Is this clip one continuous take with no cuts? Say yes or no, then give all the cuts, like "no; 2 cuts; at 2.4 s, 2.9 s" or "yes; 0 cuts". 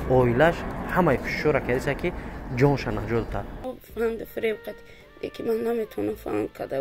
no; 1 cut; at 3.6 s